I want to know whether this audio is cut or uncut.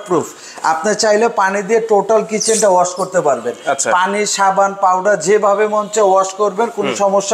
uncut